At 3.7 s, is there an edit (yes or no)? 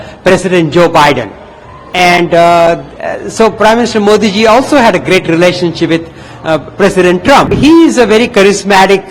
no